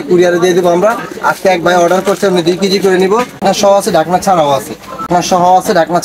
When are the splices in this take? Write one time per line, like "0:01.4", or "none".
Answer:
0:03.4
0:05.1